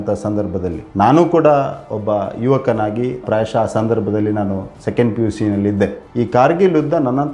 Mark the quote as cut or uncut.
uncut